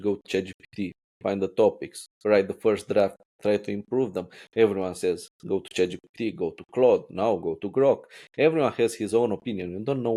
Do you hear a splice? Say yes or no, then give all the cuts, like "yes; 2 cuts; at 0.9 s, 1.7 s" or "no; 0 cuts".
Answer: no; 0 cuts